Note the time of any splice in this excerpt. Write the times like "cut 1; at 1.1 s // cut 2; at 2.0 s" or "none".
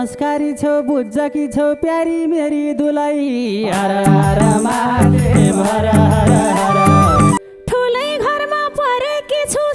cut 1; at 7.4 s